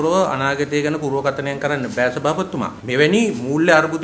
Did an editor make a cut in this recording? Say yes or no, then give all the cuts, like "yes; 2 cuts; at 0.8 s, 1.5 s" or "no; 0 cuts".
yes; 1 cut; at 2.8 s